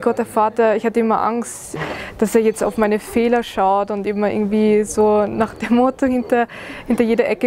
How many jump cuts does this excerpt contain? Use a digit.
1